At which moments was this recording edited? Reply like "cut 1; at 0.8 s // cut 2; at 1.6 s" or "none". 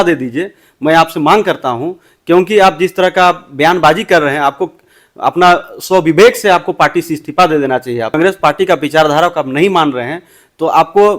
cut 1; at 8.1 s

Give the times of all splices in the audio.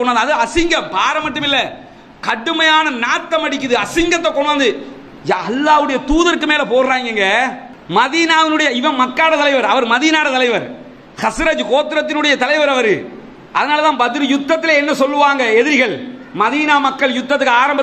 cut 1; at 7.7 s

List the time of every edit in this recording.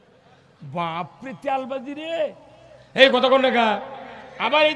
none

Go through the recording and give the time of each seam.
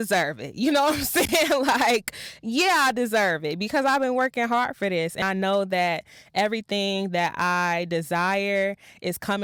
none

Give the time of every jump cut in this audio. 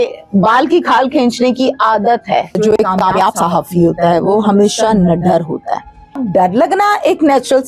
cut 1; at 2.6 s // cut 2; at 6.2 s

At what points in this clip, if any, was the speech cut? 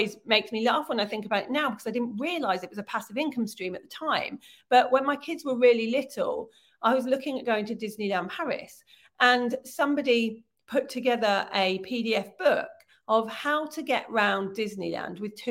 none

